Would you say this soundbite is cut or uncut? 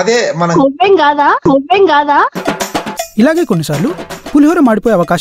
uncut